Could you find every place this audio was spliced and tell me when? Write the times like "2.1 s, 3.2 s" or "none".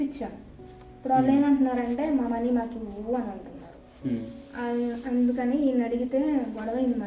none